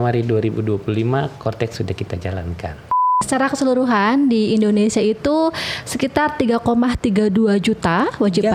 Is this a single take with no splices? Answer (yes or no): no